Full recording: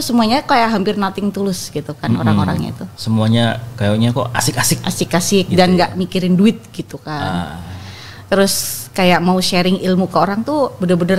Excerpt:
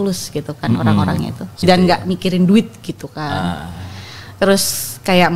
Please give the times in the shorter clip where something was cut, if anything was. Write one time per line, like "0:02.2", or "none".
0:01.6